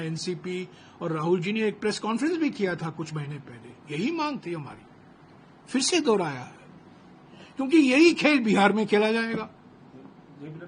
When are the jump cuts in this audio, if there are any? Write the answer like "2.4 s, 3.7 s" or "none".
none